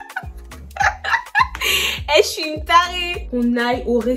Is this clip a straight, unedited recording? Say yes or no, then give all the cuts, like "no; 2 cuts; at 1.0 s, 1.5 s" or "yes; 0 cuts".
no; 1 cut; at 3.3 s